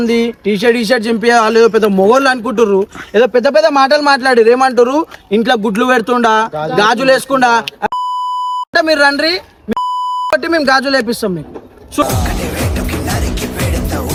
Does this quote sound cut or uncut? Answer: uncut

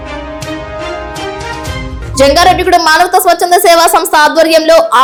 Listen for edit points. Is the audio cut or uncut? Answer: uncut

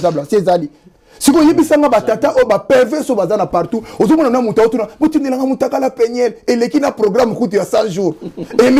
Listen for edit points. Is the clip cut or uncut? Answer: uncut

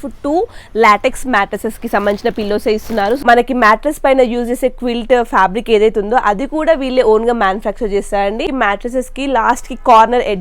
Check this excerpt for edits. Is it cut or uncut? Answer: cut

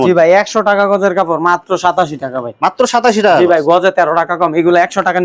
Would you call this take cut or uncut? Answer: uncut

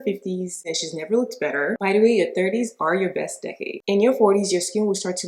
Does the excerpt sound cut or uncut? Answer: cut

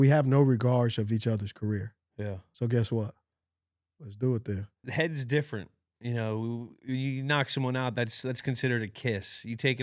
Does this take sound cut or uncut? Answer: cut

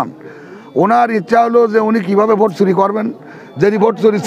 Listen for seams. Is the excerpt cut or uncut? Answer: uncut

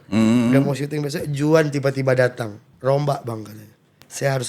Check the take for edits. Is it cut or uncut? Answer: cut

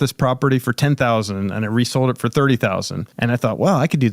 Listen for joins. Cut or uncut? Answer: cut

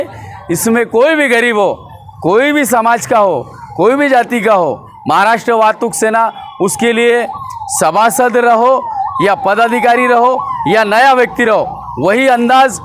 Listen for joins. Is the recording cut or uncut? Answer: uncut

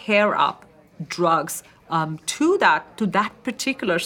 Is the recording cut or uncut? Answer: uncut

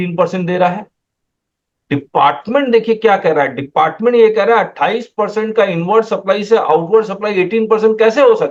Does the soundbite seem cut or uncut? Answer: uncut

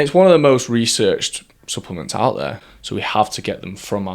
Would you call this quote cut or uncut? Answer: cut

